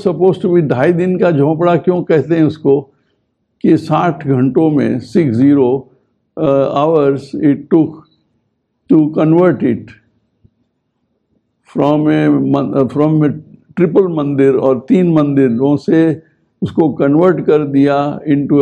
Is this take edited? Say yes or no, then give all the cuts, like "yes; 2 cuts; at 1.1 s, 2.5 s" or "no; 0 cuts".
no; 0 cuts